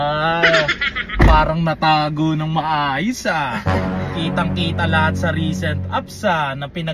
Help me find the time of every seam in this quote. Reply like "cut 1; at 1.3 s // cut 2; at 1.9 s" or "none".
none